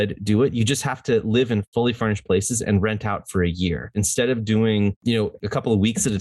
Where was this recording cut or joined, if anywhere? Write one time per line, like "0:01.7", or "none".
0:01.7
0:03.9
0:05.3